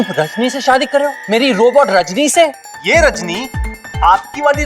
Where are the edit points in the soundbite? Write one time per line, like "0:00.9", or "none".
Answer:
0:01.2
0:02.7